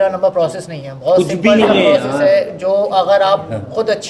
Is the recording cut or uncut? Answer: uncut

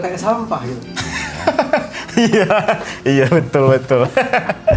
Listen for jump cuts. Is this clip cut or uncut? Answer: uncut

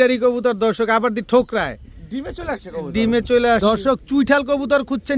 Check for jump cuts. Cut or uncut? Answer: cut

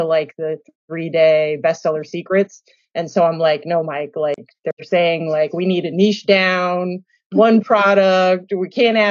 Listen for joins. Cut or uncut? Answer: uncut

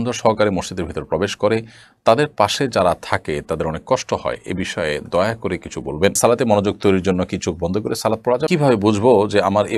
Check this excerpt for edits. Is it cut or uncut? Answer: cut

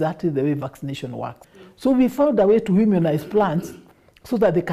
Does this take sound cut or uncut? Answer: uncut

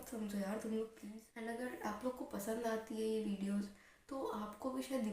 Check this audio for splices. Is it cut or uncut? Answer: cut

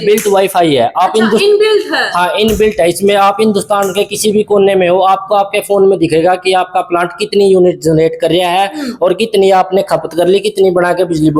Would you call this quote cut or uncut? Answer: uncut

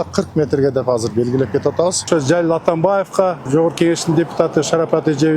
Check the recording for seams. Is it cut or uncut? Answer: cut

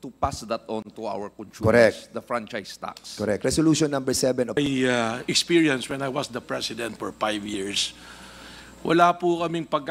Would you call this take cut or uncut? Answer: cut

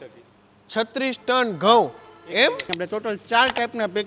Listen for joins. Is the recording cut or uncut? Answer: cut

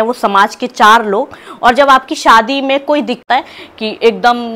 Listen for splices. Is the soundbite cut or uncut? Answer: cut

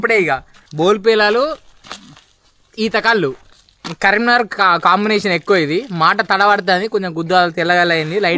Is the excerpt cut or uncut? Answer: uncut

